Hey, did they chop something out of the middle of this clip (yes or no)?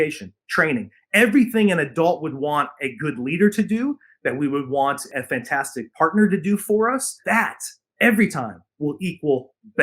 yes